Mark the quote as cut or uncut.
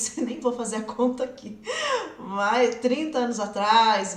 uncut